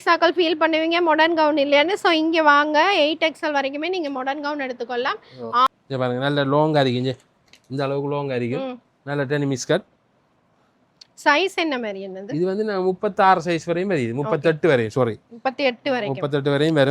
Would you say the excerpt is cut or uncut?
cut